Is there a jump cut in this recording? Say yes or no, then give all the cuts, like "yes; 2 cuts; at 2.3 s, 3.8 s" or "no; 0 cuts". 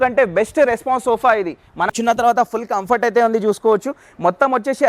yes; 1 cut; at 1.9 s